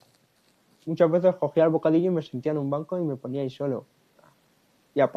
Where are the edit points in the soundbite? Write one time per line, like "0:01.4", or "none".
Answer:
none

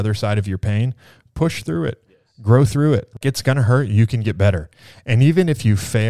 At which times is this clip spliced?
0:03.2

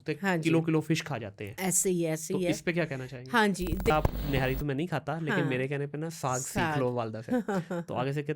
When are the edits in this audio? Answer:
0:03.9

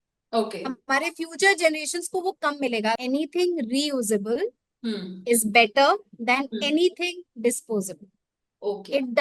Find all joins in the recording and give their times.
0:03.0

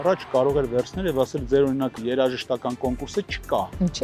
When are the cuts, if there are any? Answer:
0:02.0

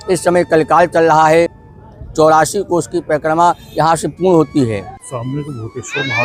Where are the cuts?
0:01.6
0:05.0

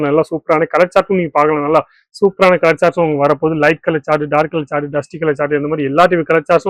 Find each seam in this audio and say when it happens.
none

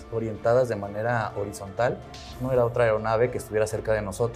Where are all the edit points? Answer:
0:02.4

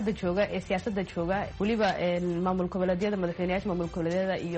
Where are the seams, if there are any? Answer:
0:01.5

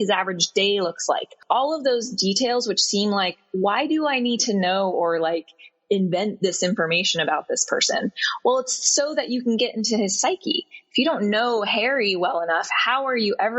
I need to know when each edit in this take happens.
0:01.3

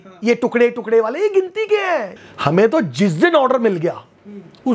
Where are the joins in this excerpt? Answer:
0:02.2

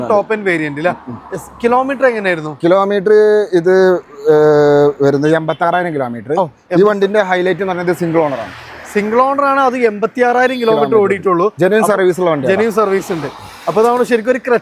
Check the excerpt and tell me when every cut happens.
none

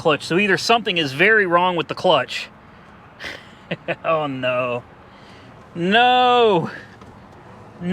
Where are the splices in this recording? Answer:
none

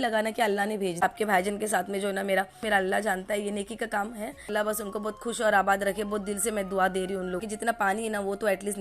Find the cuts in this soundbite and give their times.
0:01.0
0:02.6
0:04.5
0:07.4

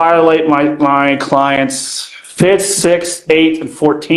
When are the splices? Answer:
none

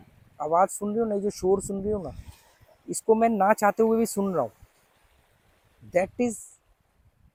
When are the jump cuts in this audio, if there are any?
none

